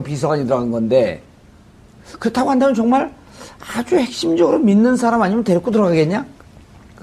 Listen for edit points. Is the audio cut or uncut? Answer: cut